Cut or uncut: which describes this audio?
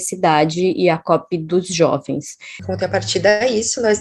cut